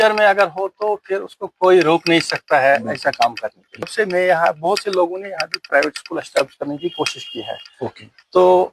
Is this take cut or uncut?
cut